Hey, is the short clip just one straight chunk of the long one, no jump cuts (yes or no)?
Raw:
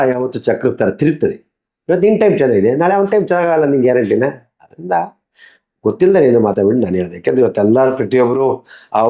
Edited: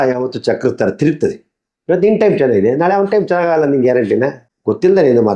no